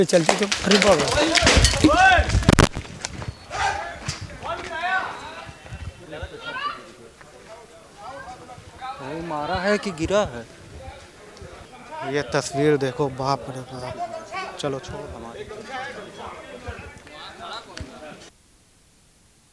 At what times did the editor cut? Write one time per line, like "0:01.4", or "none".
0:11.7

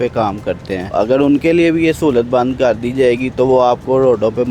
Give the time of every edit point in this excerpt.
0:00.9

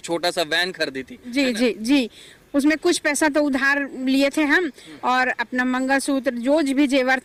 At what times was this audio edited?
none

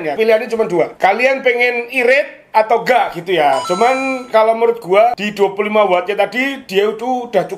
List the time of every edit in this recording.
0:00.9
0:05.2

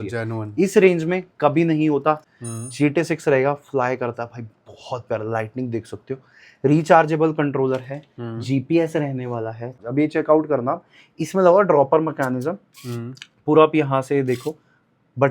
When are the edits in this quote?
0:02.3
0:09.7

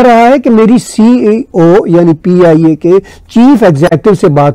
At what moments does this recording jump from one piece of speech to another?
none

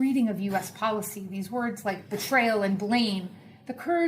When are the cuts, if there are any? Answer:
0:02.7

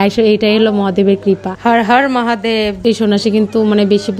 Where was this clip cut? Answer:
0:02.8

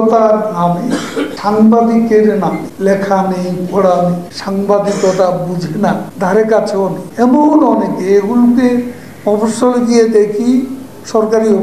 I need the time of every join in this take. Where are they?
0:01.3
0:02.7
0:04.3
0:06.1
0:07.0

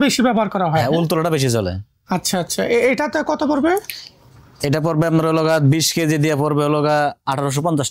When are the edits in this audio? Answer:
none

